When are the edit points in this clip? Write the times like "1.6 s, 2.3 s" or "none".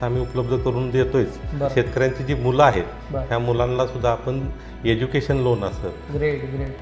1.7 s